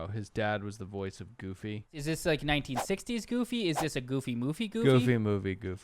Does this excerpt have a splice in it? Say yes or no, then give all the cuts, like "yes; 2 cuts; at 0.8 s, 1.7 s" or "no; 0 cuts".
yes; 1 cut; at 1.9 s